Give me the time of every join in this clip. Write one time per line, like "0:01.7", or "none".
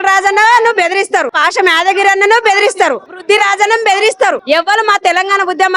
0:01.4
0:03.2
0:04.4